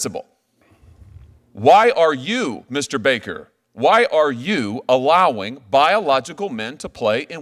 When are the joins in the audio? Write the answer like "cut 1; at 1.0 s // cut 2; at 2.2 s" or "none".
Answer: none